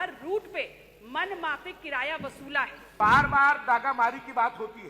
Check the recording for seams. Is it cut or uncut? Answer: cut